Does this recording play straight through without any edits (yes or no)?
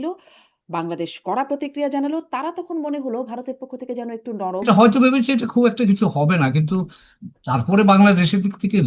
no